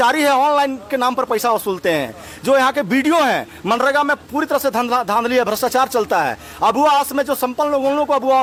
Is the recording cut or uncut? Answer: uncut